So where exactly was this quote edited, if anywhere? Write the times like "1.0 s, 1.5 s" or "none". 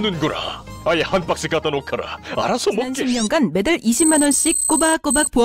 2.9 s